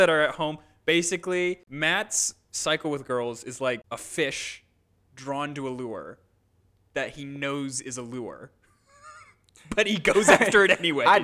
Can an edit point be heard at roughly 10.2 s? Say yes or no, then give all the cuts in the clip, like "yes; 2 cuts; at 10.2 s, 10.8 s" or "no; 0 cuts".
no; 2 cuts; at 1.7 s, 3.8 s